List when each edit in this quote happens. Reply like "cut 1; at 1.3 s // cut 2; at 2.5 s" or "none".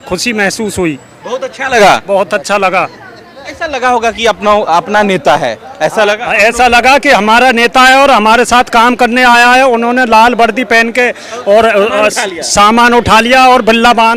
none